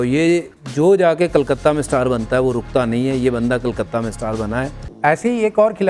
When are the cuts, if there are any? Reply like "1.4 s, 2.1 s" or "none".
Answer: 4.8 s